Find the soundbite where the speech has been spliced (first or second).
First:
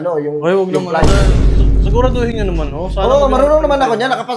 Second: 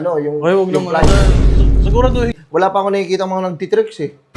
second